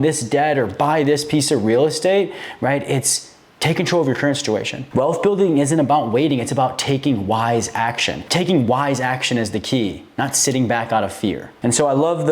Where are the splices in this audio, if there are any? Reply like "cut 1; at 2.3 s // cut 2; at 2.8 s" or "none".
cut 1; at 4.8 s // cut 2; at 8.2 s // cut 3; at 11.5 s

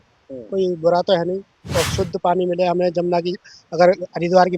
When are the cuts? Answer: cut 1; at 1.6 s

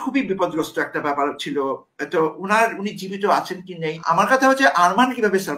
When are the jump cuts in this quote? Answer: cut 1; at 4.0 s

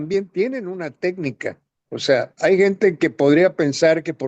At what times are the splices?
none

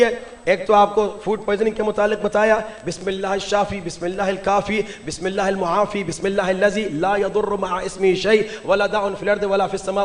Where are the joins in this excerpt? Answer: none

